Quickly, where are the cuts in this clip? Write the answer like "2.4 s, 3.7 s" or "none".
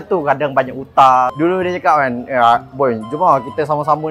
1.3 s